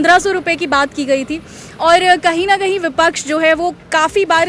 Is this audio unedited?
yes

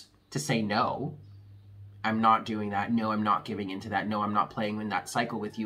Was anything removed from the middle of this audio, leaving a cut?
no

